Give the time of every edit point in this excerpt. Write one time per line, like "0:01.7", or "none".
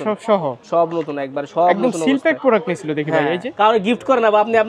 0:03.5